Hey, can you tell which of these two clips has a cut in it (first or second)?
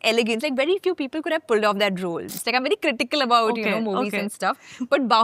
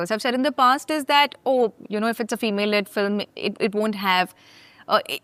first